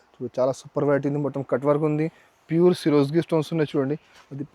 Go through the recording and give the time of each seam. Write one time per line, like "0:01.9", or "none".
none